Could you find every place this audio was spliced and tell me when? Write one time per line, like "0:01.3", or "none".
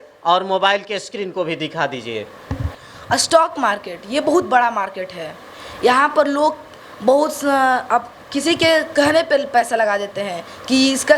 0:02.7